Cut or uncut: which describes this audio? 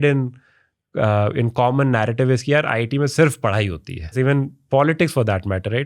cut